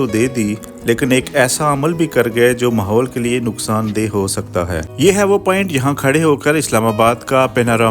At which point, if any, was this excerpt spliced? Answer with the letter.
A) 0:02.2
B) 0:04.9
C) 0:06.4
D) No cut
B